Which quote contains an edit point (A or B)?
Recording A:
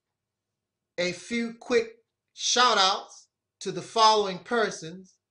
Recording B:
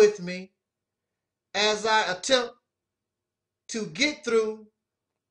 B